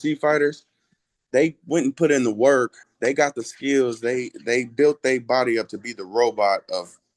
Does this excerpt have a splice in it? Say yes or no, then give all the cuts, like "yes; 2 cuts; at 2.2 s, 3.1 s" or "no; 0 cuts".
yes; 1 cut; at 2.8 s